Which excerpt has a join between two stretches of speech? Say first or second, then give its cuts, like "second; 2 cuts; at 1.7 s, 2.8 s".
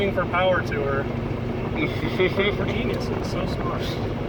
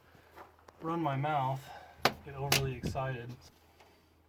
second; 1 cut; at 3.4 s